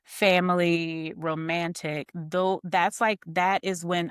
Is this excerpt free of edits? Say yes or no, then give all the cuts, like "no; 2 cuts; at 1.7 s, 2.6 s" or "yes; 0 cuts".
yes; 0 cuts